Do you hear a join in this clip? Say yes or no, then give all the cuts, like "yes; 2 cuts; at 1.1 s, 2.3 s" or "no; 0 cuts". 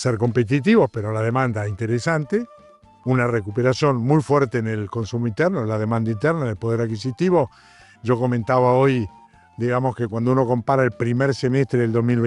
no; 0 cuts